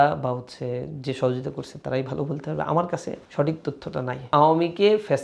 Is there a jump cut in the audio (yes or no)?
yes